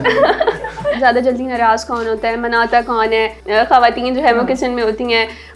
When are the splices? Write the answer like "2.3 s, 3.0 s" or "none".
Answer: 1.0 s, 3.4 s